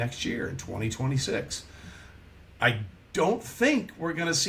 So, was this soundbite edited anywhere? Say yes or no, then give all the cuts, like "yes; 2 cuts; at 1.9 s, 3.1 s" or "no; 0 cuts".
no; 0 cuts